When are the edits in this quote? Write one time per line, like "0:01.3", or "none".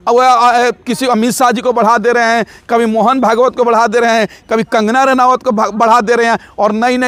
none